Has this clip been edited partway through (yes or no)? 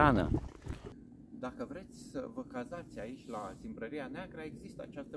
yes